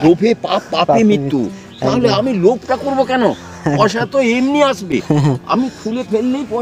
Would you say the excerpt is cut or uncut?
uncut